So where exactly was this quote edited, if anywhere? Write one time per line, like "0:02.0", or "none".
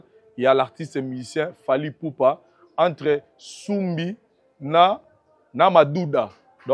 none

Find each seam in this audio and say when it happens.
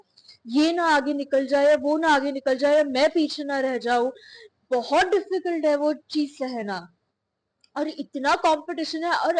none

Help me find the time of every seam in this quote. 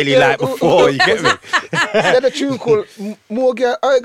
none

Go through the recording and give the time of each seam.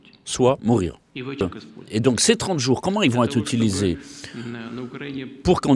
0:01.4

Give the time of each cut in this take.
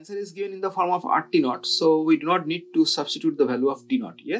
none

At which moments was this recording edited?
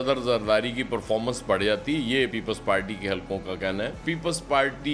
0:04.0

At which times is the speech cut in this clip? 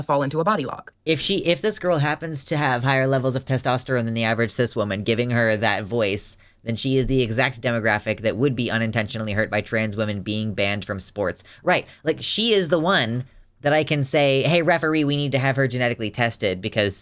0:00.9

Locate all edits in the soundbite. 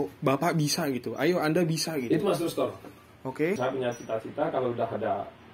0:03.6

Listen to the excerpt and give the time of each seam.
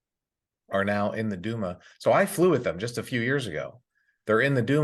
none

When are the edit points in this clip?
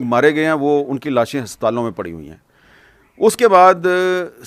none

